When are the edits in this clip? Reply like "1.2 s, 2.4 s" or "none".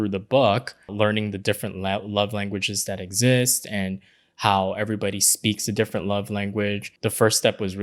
0.9 s, 6.9 s